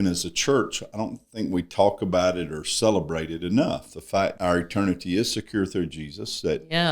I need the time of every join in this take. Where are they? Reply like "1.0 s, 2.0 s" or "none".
4.4 s